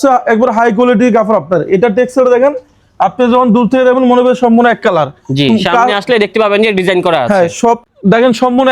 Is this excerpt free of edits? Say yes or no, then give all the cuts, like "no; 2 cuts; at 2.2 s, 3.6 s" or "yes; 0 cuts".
no; 1 cut; at 7.8 s